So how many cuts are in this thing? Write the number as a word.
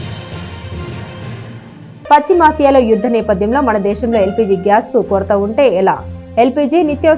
one